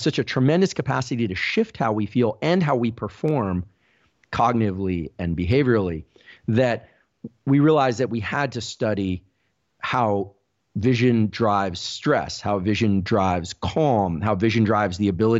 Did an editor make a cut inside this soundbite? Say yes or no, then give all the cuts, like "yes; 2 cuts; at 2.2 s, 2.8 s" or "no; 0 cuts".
no; 0 cuts